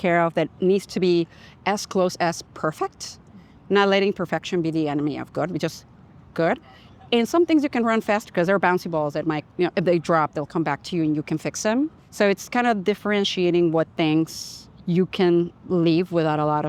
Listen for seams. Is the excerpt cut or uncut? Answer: uncut